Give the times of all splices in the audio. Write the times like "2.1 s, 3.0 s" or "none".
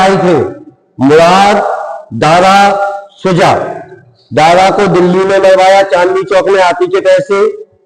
none